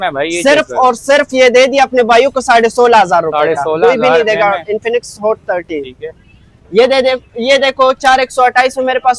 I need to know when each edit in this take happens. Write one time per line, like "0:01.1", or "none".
none